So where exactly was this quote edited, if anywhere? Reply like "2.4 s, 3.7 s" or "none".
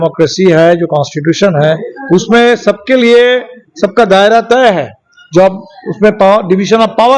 none